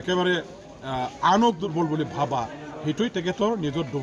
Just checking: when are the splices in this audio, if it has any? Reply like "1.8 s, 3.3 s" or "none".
1.7 s